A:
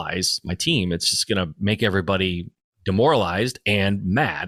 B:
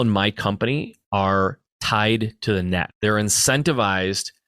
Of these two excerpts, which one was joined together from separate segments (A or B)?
B